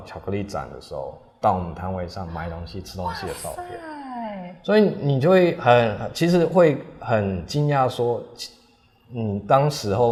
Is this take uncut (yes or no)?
yes